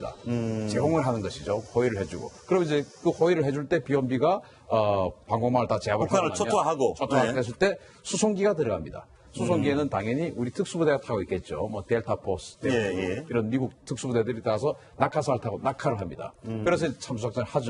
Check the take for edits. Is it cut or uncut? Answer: cut